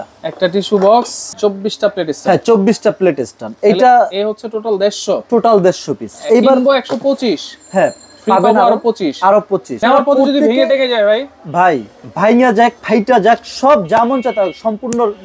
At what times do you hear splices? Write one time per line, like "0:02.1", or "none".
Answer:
0:01.2
0:09.8